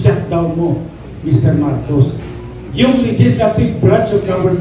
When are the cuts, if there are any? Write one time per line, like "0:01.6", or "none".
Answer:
none